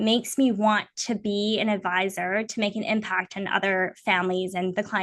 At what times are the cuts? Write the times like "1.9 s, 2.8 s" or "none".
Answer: none